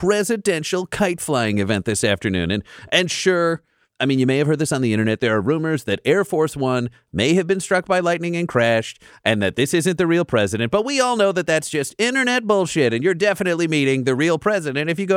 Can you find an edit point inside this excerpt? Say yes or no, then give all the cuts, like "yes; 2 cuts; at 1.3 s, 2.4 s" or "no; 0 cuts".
no; 0 cuts